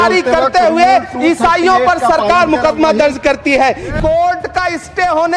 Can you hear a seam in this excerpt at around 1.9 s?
no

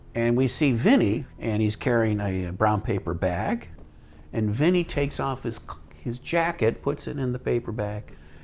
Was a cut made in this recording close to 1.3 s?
yes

